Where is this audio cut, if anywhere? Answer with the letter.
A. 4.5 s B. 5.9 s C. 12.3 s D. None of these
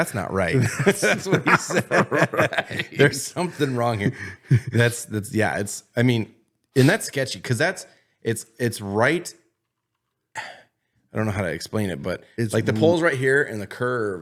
D